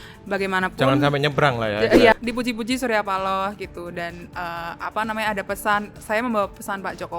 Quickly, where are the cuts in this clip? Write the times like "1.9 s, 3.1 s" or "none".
2.1 s